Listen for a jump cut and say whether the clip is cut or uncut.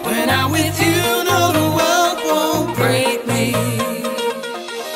uncut